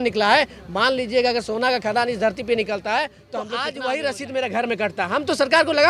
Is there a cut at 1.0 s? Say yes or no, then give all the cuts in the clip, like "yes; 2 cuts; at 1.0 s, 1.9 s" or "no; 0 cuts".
no; 1 cut; at 3.5 s